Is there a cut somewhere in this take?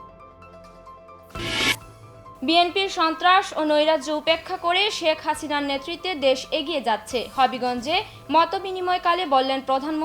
yes; 1 cut; at 1.2 s

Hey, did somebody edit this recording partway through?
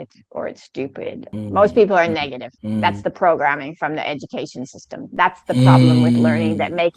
yes; 1 cut; at 1.4 s

